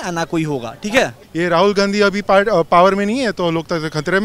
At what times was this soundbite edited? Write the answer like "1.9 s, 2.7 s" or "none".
1.2 s